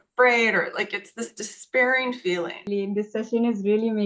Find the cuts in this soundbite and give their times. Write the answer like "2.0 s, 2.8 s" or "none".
2.7 s